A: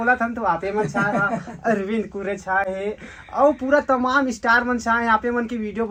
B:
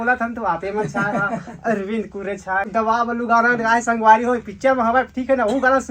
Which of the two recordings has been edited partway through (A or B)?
B